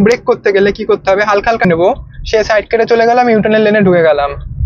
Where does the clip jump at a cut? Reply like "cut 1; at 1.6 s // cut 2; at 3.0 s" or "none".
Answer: cut 1; at 1.7 s